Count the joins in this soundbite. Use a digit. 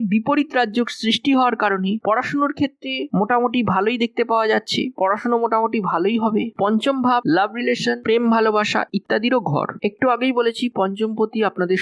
1